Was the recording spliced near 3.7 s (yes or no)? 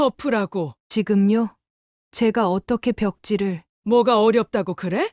yes